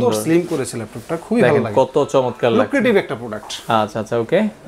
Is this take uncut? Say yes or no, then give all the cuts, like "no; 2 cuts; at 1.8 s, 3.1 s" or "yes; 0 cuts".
yes; 0 cuts